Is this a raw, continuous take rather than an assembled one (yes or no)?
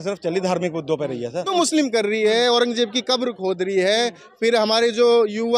no